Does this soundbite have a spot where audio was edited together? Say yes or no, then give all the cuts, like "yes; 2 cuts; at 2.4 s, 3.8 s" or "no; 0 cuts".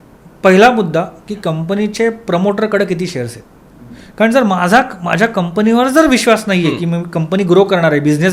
no; 0 cuts